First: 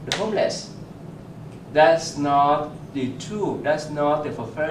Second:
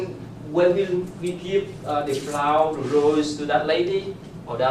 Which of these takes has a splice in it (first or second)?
first